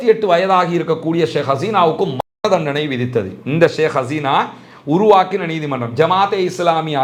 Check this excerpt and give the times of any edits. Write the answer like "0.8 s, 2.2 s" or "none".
none